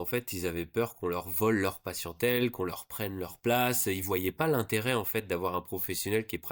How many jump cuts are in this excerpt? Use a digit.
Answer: 0